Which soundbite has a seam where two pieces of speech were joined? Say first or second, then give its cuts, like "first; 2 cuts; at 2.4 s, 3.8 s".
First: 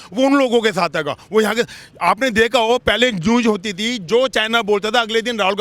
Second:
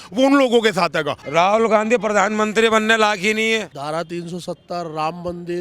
second; 2 cuts; at 1.2 s, 3.8 s